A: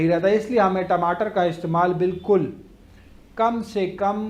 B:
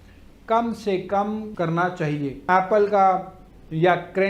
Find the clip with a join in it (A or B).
B